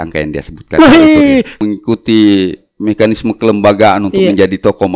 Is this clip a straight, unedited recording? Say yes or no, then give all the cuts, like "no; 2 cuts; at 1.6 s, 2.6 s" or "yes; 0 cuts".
no; 1 cut; at 1.5 s